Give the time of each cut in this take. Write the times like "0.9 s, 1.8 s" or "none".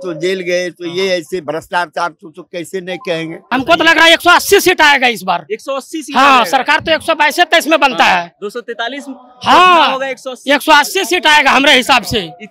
3.4 s